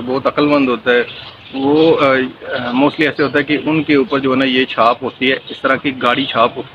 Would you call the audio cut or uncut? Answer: uncut